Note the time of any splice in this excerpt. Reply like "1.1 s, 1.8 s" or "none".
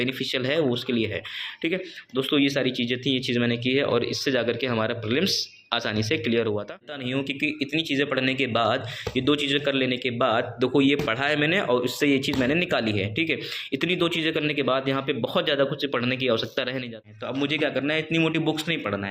7.0 s, 16.9 s